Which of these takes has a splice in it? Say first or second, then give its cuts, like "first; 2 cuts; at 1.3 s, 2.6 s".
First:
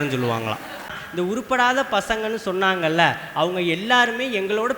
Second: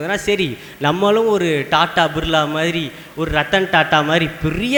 first; 1 cut; at 1.0 s